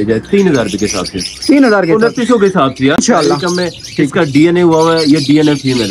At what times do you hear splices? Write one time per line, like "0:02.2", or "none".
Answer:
0:03.0